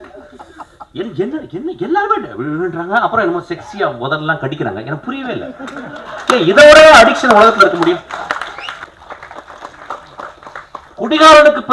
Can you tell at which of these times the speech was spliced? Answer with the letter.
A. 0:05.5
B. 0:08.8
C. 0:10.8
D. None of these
B